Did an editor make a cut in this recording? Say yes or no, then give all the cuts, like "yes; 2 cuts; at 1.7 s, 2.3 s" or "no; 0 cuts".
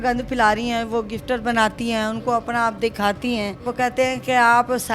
yes; 1 cut; at 3.7 s